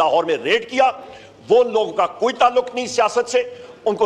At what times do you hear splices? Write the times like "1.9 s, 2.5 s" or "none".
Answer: none

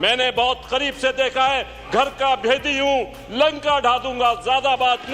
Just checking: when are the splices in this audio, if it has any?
none

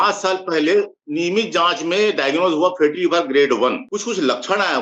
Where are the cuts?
1.0 s, 3.8 s

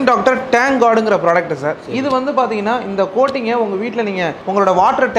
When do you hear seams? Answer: none

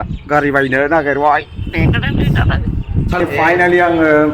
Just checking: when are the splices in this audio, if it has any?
3.2 s

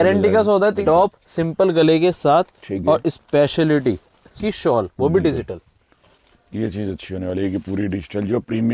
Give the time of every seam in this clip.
0.8 s, 4.3 s

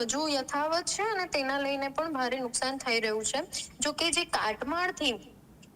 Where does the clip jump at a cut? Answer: none

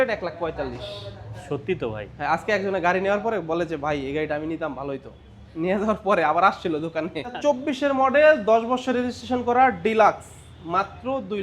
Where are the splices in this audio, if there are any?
7.4 s

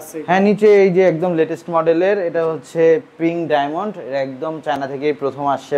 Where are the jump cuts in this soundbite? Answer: none

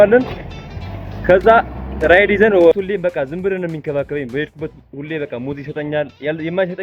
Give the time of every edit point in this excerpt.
2.7 s

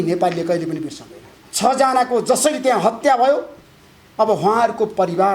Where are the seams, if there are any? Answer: 1.4 s

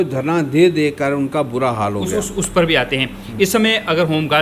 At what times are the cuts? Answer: none

